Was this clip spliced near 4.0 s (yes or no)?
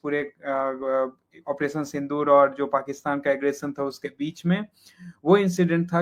no